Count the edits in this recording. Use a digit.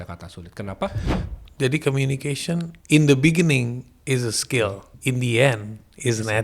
3